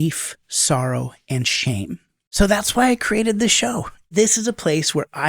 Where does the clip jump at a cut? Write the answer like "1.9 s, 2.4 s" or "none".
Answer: 2.2 s, 4.1 s